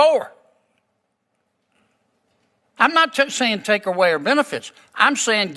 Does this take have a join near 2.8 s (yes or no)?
no